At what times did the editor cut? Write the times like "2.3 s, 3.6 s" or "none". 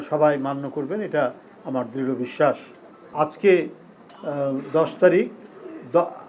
3.1 s